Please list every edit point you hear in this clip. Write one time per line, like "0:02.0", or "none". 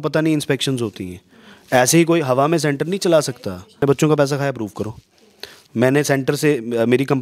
0:03.8